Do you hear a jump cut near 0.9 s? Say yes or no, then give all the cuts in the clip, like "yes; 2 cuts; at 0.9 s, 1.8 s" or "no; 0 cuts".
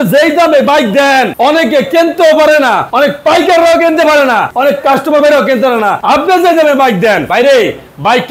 no; 4 cuts; at 2.9 s, 4.5 s, 6.0 s, 7.2 s